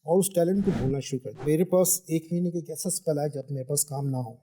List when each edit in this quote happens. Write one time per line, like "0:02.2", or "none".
0:01.4